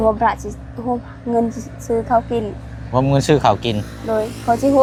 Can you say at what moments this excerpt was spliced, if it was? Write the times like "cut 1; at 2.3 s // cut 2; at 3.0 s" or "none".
none